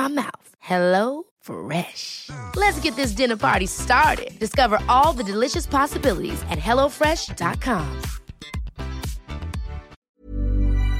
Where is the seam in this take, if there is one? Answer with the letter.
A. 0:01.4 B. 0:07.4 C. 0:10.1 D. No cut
C